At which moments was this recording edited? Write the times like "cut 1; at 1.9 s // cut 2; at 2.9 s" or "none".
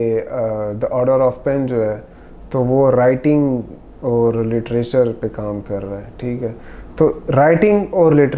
none